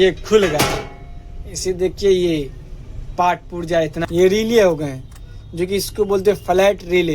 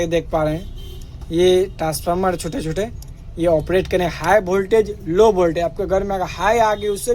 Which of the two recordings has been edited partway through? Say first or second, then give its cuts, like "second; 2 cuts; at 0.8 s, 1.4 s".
first; 1 cut; at 4.0 s